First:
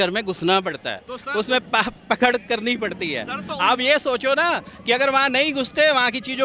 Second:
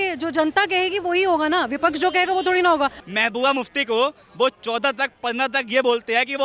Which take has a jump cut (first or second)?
second